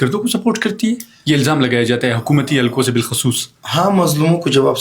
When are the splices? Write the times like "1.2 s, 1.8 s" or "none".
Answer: none